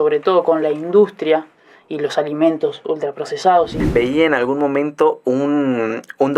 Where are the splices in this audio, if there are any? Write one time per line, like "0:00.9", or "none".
0:03.8